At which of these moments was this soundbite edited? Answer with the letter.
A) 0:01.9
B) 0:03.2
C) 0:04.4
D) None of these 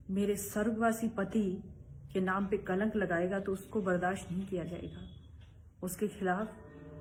D